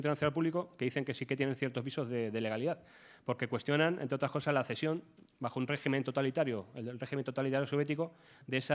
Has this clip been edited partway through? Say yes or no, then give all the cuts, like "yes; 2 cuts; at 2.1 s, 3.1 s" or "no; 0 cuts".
yes; 1 cut; at 2.0 s